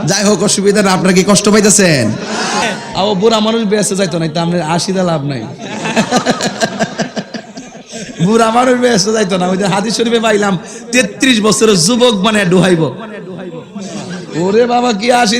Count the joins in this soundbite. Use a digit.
1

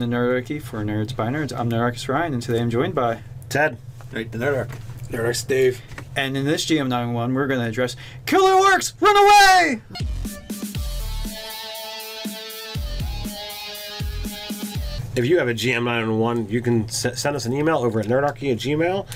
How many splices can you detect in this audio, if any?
0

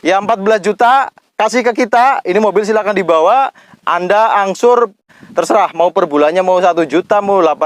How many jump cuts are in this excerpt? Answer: 1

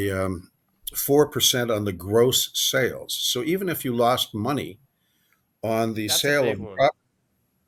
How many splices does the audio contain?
0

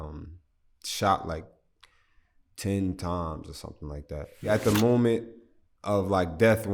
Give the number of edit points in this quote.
1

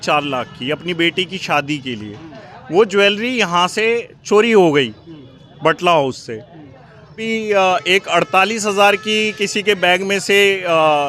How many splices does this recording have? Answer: 1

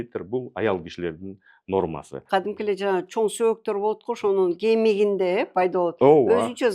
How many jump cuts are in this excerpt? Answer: 1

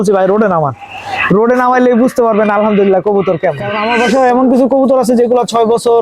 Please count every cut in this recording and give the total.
1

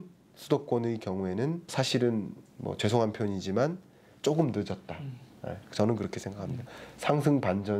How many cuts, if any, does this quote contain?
1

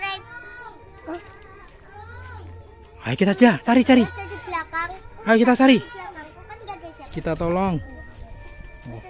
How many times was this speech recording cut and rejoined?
1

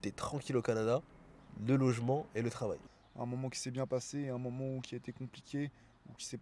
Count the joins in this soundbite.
1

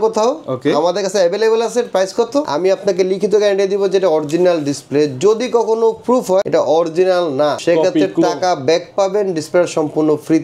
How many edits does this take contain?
3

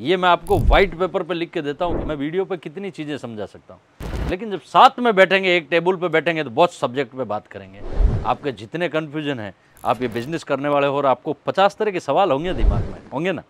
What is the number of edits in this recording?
1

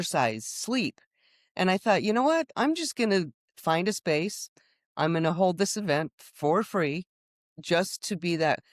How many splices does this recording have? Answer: 0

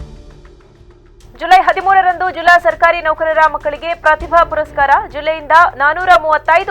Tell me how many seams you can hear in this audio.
1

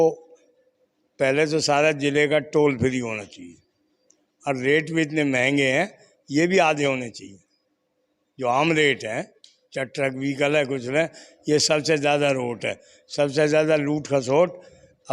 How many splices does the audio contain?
0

